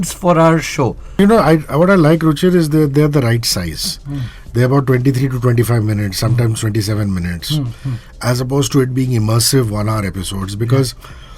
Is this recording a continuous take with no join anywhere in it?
no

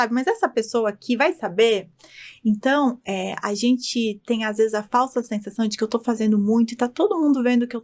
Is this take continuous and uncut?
yes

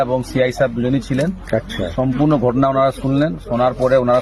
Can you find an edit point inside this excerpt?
no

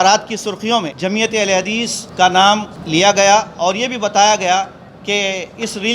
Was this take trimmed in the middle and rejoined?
yes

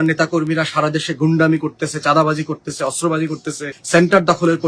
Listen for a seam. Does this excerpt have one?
yes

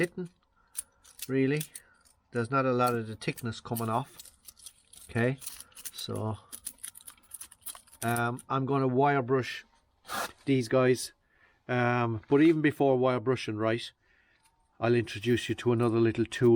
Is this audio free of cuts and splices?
yes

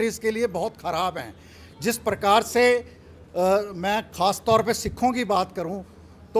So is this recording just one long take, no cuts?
yes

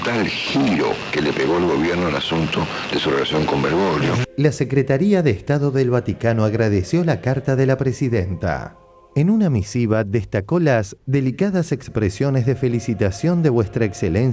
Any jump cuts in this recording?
yes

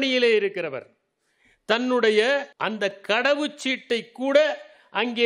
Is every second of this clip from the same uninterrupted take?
no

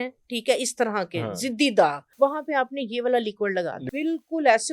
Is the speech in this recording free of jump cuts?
no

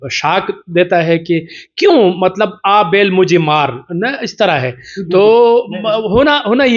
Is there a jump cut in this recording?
no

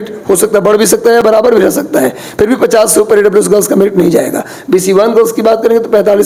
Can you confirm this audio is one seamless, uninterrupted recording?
yes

